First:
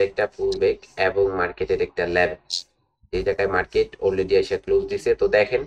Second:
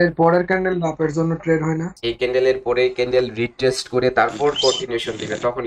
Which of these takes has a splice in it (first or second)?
second